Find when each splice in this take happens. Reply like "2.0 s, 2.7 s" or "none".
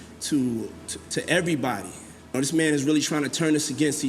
2.3 s